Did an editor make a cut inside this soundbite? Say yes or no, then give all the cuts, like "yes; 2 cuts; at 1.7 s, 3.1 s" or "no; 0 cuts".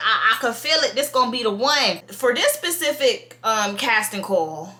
no; 0 cuts